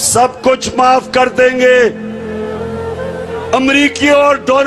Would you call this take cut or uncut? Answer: cut